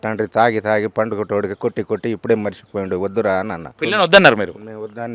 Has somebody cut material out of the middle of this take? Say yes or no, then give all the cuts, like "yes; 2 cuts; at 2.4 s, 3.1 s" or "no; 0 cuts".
yes; 1 cut; at 3.8 s